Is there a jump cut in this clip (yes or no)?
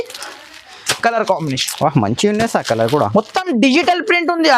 no